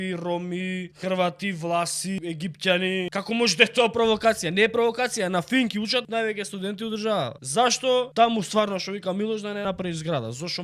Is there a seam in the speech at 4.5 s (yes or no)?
no